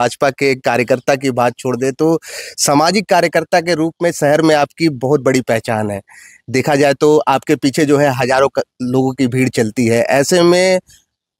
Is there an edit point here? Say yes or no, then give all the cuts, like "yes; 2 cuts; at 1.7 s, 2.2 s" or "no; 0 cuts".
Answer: no; 0 cuts